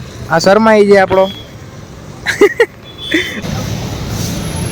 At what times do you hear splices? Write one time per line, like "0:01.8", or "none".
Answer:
0:03.1